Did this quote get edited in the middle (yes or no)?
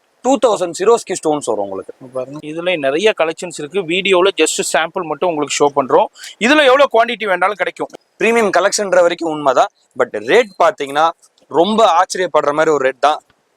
yes